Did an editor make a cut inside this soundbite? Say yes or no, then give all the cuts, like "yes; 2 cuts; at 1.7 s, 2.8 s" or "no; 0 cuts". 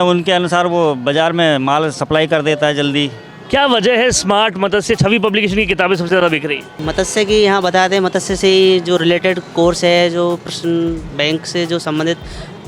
yes; 2 cuts; at 3.3 s, 6.8 s